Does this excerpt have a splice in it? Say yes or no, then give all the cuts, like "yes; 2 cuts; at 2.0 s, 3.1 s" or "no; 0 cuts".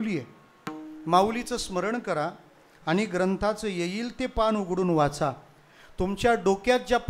no; 0 cuts